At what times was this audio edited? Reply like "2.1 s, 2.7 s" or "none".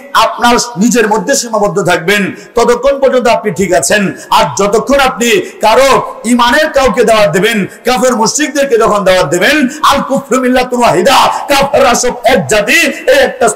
none